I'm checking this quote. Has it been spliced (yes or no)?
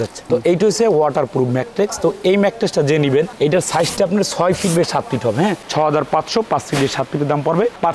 no